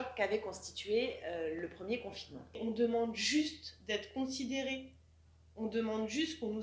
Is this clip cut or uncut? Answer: cut